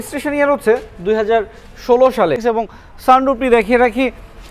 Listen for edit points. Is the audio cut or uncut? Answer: cut